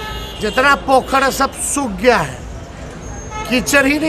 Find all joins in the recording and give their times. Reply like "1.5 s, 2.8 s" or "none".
none